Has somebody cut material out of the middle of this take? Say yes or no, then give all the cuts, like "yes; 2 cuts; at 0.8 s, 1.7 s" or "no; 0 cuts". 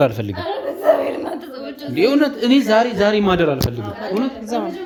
no; 0 cuts